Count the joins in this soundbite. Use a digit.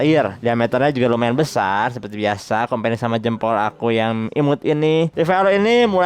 1